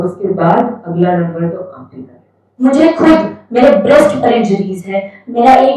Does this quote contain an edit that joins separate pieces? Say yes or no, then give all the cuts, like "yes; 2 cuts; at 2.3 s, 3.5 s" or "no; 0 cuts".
yes; 1 cut; at 2.5 s